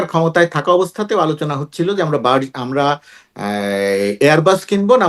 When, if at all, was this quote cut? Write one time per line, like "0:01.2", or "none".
none